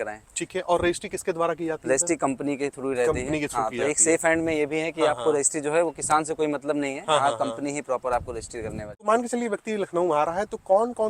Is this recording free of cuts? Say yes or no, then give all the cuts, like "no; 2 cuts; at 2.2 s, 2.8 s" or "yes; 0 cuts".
no; 1 cut; at 8.8 s